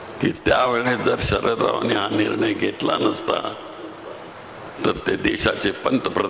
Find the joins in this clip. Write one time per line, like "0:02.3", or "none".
none